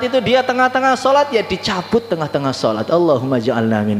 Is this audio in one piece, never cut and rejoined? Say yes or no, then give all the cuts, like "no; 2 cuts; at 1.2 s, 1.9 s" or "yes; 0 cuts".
yes; 0 cuts